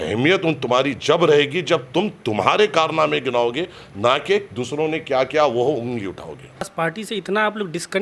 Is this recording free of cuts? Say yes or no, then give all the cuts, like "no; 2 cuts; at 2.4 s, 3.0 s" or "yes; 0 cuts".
no; 1 cut; at 6.7 s